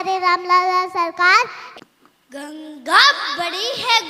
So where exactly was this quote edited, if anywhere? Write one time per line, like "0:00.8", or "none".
0:01.6